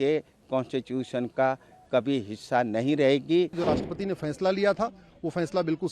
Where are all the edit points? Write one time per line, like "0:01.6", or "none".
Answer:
0:03.6